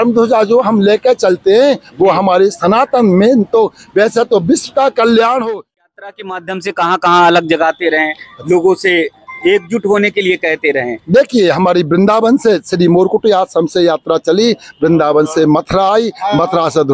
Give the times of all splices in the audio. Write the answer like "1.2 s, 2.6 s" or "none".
5.8 s